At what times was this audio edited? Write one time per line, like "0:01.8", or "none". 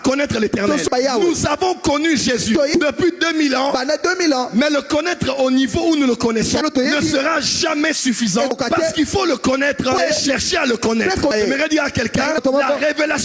0:00.9
0:02.7
0:06.6
0:08.5
0:10.0
0:11.3
0:12.4